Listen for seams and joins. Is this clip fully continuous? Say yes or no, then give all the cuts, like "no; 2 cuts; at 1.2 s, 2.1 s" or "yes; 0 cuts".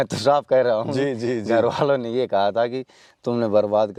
yes; 0 cuts